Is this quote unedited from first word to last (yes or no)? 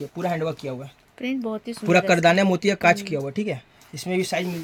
yes